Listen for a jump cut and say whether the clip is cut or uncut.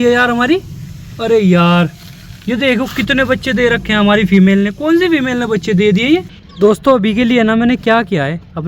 cut